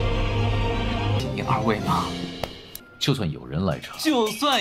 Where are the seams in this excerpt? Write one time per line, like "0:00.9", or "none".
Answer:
0:01.2